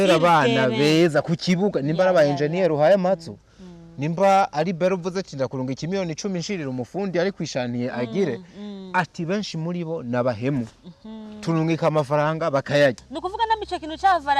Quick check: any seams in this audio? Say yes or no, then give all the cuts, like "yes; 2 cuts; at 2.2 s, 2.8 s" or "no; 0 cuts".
yes; 1 cut; at 13.0 s